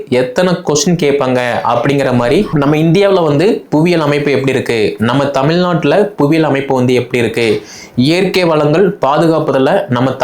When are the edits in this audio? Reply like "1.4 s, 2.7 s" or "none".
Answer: 2.5 s